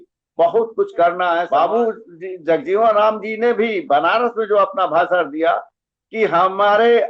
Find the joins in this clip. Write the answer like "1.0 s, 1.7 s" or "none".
1.5 s